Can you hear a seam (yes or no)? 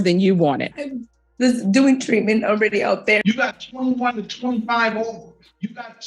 yes